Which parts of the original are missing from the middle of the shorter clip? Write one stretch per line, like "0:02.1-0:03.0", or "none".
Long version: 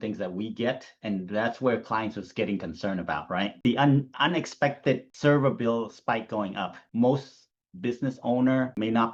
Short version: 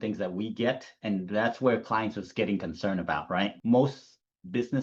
0:03.5-0:06.8